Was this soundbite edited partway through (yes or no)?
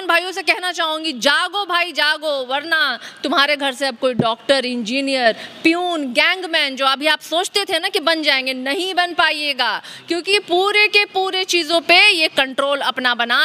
no